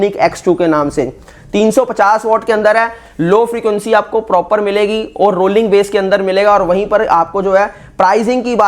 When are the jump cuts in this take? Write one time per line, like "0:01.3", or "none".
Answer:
none